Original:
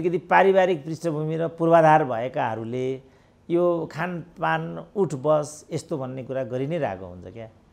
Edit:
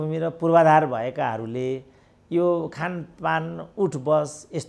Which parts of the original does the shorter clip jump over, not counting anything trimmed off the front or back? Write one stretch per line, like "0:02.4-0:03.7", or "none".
none